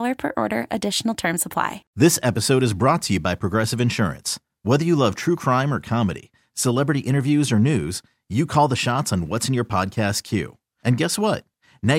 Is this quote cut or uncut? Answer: cut